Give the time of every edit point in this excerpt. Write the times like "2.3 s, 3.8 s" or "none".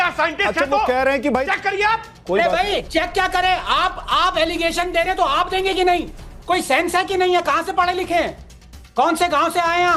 none